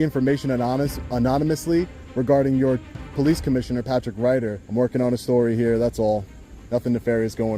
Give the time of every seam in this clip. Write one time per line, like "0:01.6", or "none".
0:04.5